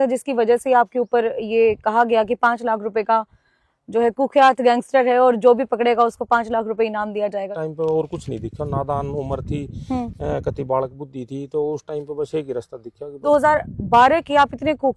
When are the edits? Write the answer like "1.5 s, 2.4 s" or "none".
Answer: 7.5 s, 13.2 s